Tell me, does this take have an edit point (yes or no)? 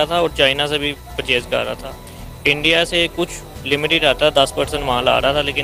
no